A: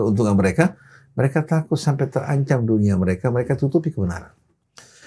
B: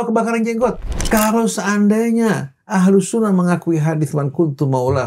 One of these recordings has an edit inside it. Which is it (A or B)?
B